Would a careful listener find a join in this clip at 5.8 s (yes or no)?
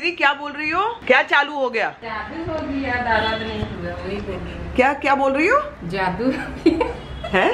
no